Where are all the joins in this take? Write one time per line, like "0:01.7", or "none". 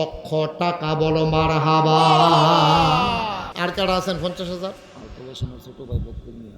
0:03.4